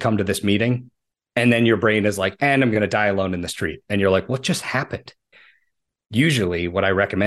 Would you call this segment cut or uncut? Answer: cut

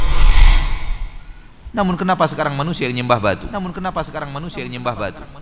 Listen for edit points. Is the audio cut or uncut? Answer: cut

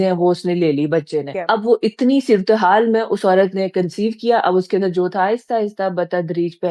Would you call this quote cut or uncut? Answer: cut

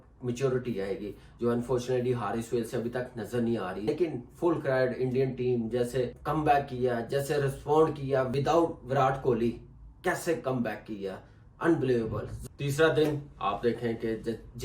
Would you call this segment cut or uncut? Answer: cut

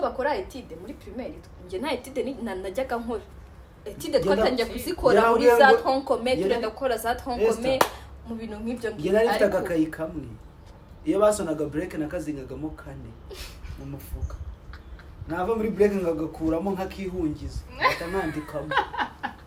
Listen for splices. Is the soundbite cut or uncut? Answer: uncut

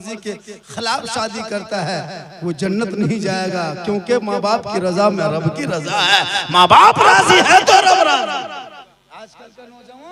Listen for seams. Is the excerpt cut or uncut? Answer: cut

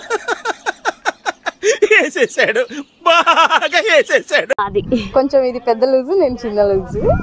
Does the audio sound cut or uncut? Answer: uncut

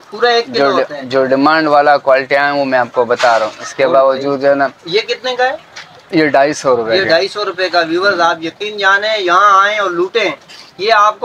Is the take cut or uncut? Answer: uncut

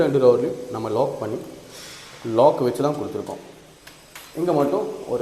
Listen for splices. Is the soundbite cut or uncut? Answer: uncut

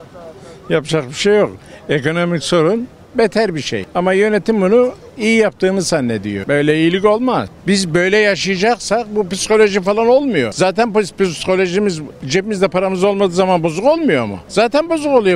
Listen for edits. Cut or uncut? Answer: cut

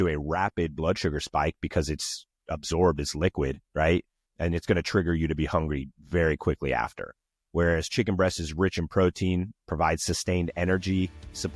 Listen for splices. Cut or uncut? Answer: uncut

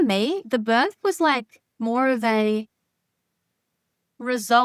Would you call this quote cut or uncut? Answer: uncut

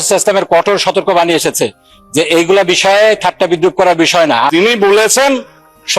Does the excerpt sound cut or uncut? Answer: cut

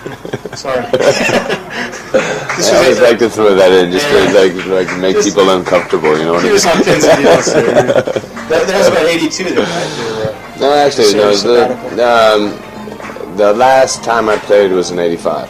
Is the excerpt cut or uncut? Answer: uncut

